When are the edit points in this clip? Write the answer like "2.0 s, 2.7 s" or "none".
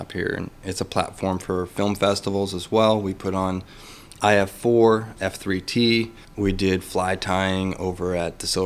5.1 s, 6.2 s